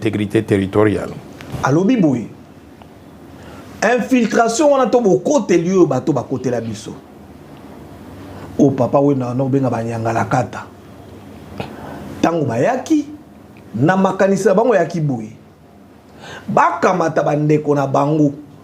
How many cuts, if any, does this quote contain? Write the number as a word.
one